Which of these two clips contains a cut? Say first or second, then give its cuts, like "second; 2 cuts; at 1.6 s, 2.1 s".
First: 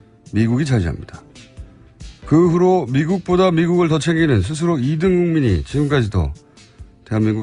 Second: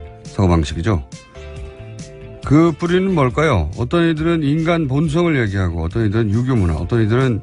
first; 1 cut; at 5.6 s